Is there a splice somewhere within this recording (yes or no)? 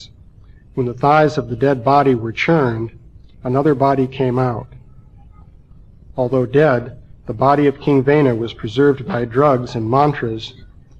no